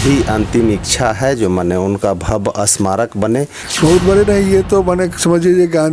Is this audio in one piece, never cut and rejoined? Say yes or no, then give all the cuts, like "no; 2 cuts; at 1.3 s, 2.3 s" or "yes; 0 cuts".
no; 1 cut; at 3.6 s